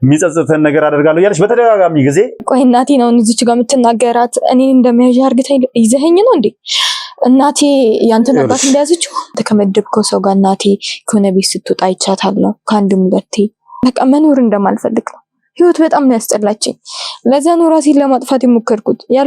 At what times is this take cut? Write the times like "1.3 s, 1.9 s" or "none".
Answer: 2.4 s, 9.4 s, 13.6 s